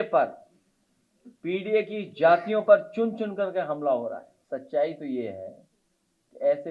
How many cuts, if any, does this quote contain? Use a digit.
1